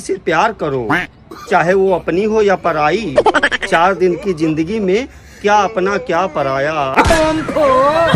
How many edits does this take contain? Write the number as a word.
one